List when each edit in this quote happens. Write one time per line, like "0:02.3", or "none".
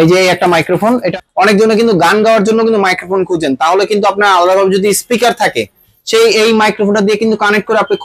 0:01.1